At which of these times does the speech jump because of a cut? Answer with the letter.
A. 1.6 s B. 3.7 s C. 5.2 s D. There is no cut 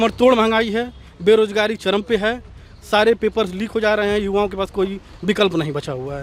D